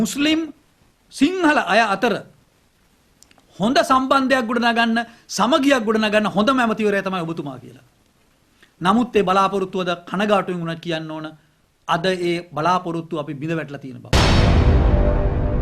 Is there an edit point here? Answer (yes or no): yes